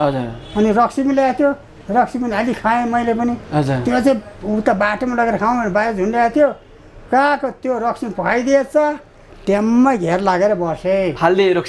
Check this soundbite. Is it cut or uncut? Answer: uncut